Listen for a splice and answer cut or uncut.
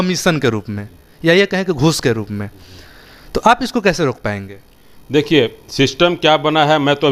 uncut